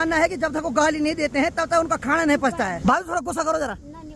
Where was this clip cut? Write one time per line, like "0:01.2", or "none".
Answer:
0:02.8